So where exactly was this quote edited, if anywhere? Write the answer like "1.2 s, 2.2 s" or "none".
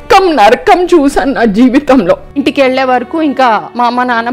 2.3 s